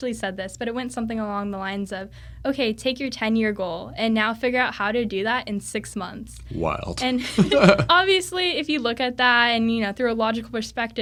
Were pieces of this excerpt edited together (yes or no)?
no